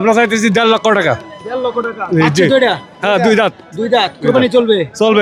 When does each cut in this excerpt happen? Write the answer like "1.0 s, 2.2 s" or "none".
none